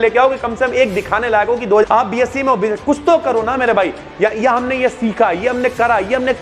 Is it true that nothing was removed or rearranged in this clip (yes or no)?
no